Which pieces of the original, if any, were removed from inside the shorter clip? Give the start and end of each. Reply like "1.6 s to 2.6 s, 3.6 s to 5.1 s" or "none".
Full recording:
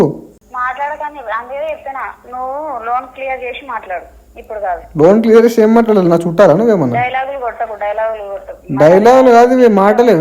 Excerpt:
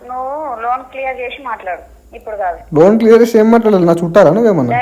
none